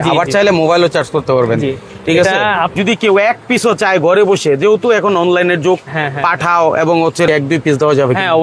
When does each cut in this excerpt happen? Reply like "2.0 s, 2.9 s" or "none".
2.7 s, 7.3 s